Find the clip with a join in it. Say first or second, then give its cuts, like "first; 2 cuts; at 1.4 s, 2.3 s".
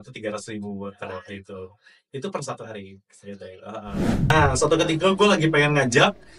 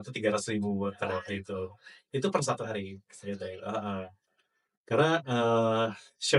first; 1 cut; at 4.3 s